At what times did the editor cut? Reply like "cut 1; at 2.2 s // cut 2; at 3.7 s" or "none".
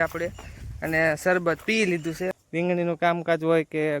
cut 1; at 2.3 s